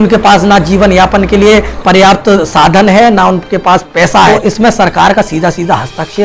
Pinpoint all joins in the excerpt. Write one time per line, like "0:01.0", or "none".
0:04.3